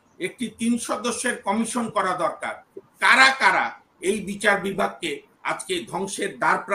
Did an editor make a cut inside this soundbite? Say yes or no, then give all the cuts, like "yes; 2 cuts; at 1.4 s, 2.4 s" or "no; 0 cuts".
no; 0 cuts